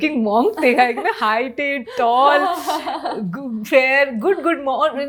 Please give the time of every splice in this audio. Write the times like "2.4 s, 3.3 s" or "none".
none